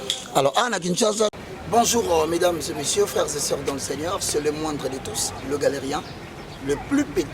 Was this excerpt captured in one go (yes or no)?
no